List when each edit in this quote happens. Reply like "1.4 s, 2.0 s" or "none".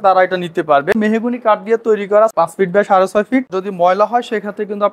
0.9 s, 2.3 s, 3.5 s